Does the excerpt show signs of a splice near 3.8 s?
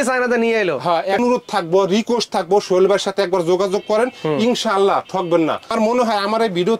no; 2 cuts; at 1.2 s, 5.7 s

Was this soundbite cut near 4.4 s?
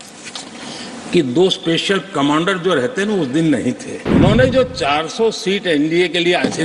yes; 1 cut; at 4.4 s

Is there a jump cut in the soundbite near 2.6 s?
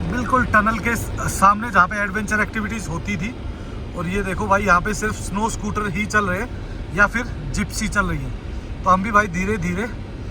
no; 0 cuts

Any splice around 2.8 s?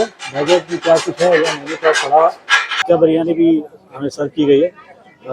yes; 1 cut; at 2.8 s

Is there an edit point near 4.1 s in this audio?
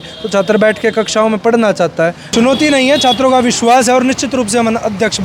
no; 1 cut; at 2.2 s

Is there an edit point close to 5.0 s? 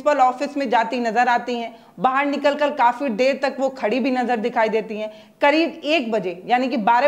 no; 0 cuts

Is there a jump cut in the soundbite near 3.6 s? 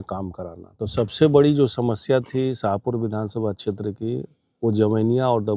no; 0 cuts

